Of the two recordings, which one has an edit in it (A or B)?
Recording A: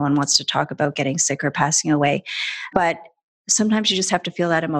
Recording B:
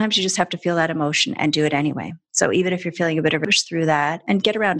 B